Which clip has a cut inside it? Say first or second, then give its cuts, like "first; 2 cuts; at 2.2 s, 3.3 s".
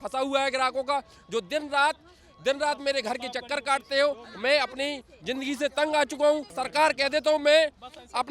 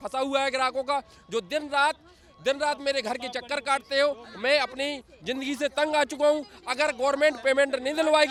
first; 1 cut; at 6.5 s